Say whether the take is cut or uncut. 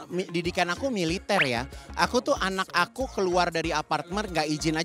uncut